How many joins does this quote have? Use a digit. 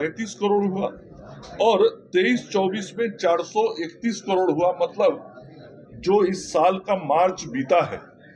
0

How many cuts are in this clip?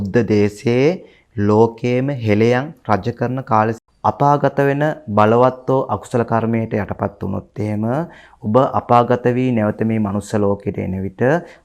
1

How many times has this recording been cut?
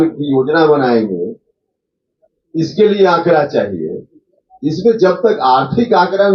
0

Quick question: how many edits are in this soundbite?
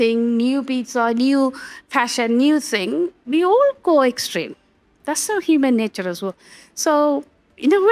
0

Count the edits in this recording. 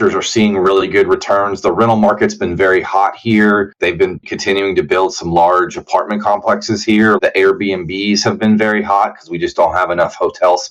2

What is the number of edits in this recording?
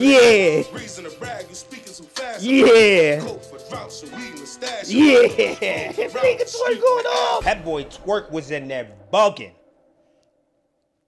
1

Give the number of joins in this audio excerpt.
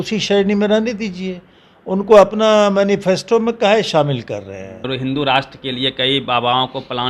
1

